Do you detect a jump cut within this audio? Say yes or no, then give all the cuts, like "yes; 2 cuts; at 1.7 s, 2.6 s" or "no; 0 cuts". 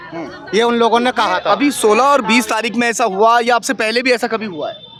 no; 0 cuts